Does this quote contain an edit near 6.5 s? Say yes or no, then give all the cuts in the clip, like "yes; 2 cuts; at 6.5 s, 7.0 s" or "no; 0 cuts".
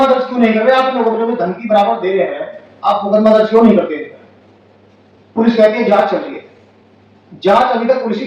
no; 0 cuts